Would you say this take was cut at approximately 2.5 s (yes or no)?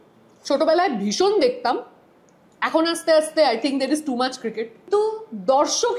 no